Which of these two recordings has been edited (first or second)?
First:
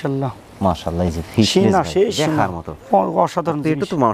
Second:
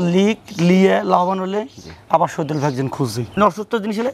second